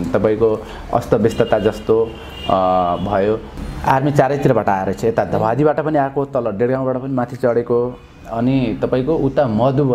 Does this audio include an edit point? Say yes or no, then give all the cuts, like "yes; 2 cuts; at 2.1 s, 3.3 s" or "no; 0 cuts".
yes; 1 cut; at 3.5 s